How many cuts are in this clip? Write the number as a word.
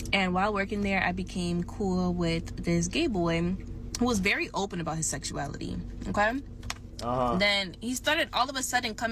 zero